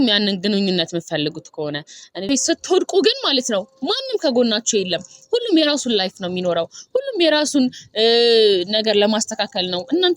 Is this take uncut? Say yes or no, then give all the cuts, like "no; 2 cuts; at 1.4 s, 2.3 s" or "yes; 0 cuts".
no; 1 cut; at 2.3 s